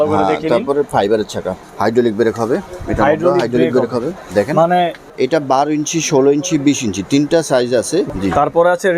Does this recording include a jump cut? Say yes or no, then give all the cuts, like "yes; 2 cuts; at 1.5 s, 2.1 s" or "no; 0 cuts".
yes; 3 cuts; at 1.6 s, 5.1 s, 8.1 s